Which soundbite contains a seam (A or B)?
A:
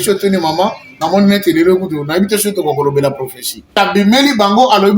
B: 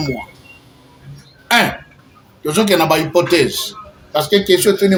A